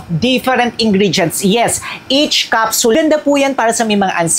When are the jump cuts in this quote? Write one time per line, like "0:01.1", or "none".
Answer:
0:03.0